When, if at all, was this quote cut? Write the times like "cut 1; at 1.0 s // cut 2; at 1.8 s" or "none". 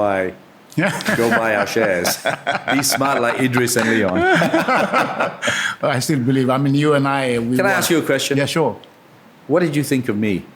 none